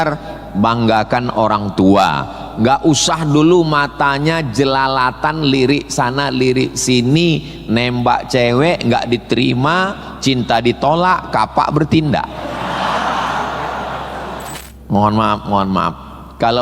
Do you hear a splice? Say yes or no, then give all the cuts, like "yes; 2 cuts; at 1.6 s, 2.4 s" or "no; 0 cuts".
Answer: yes; 1 cut; at 14.5 s